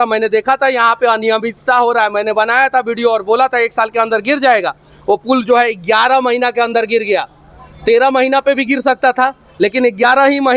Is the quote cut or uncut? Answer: uncut